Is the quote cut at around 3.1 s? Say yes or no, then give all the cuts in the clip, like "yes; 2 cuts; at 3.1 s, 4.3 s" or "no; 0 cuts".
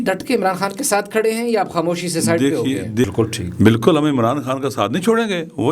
yes; 1 cut; at 3.1 s